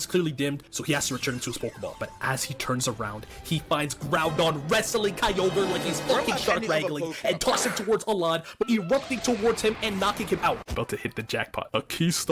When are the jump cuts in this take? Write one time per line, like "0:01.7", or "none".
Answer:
0:10.7